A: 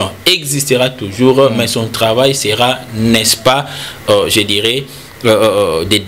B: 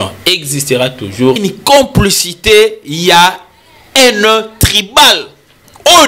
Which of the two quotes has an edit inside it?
B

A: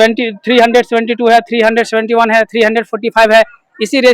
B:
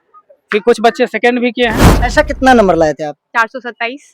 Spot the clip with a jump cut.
B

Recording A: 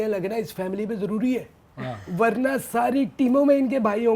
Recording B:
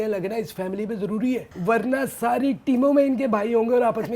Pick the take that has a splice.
B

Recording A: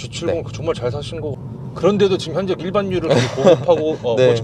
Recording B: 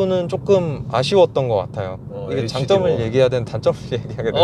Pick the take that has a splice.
A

